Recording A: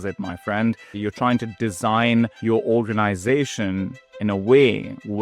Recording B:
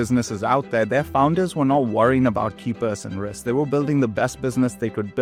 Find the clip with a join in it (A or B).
A